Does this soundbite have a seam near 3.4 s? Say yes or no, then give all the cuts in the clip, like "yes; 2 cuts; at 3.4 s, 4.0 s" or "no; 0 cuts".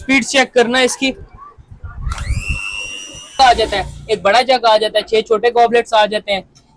yes; 1 cut; at 3.4 s